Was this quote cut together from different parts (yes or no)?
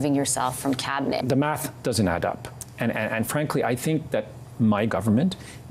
yes